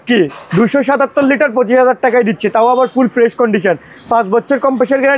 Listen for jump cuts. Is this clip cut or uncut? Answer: uncut